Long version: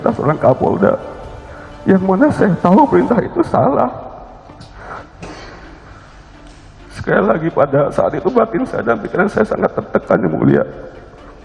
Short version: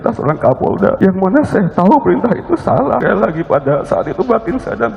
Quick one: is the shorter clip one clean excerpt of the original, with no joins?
no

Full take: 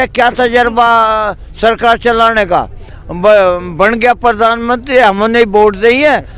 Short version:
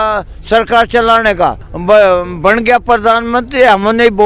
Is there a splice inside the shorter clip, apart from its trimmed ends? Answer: yes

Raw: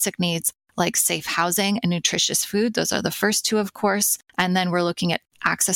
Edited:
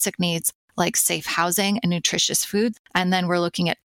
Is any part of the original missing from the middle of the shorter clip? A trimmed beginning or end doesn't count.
yes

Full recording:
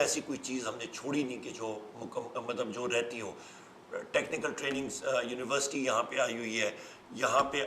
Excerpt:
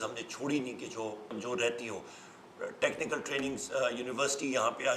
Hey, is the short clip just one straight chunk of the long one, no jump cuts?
no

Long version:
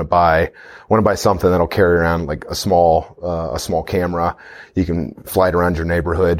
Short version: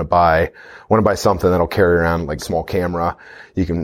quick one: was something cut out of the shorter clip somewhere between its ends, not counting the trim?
yes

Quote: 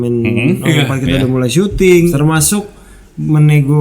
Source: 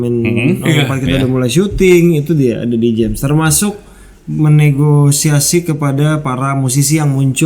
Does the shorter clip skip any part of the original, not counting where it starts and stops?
yes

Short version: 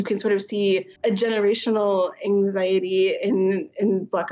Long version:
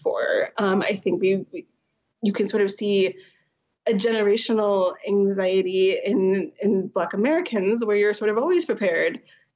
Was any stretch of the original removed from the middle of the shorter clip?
yes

